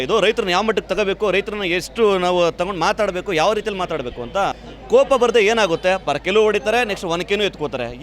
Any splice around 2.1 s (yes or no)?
no